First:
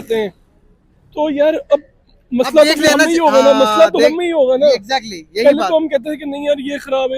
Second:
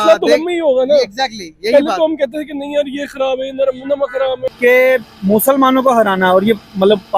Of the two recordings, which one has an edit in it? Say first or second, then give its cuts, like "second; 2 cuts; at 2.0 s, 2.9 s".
second; 1 cut; at 4.4 s